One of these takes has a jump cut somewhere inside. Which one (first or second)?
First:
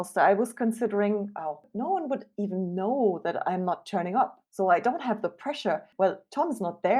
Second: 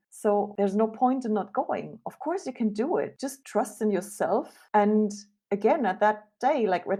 first